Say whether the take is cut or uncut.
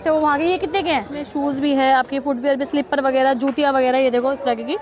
cut